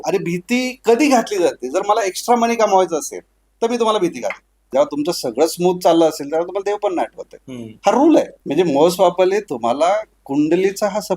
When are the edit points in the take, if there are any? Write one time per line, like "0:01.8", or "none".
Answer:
0:04.7
0:08.4

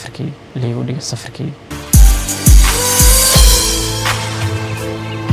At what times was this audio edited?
0:01.6

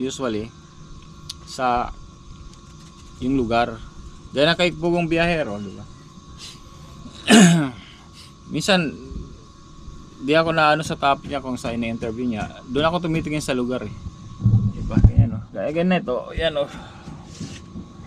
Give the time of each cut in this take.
none

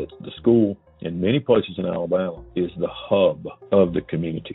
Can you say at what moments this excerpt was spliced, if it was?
0:02.4
0:03.5

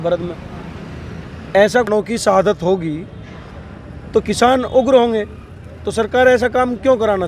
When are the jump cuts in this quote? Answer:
0:01.9

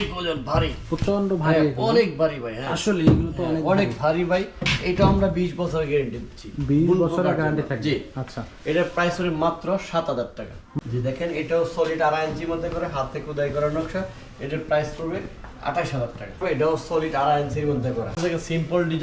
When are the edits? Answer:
0:10.6
0:16.4
0:18.2

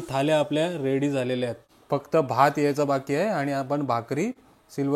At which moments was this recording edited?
0:01.7

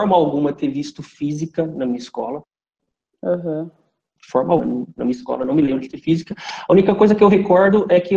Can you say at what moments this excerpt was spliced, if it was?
none

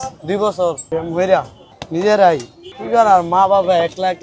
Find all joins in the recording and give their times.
0:00.8
0:01.6

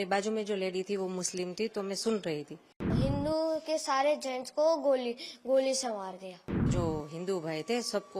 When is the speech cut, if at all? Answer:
0:02.9
0:06.7

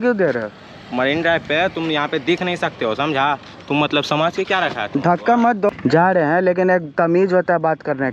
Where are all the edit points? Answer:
0:05.7

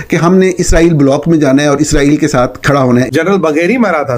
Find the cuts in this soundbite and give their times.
0:03.1

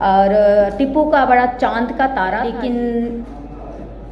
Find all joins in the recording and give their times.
0:02.5

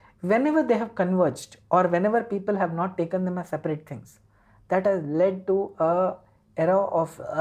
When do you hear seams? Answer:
none

